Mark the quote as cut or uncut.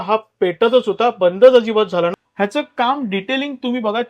cut